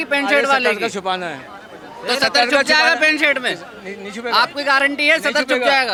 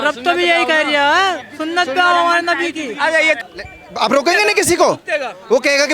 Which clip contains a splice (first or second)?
second